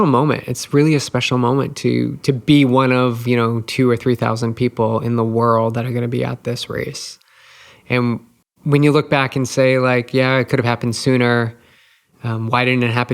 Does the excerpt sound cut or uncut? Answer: cut